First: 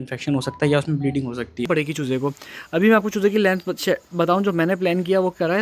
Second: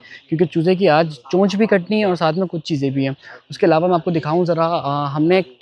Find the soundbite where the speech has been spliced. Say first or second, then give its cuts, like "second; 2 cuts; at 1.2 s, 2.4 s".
first; 1 cut; at 1.7 s